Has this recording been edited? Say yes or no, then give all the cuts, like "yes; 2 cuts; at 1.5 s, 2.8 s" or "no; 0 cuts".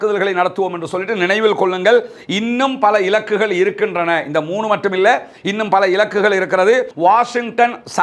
yes; 1 cut; at 6.9 s